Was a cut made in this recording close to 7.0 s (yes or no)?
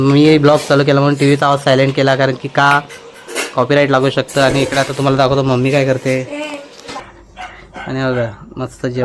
yes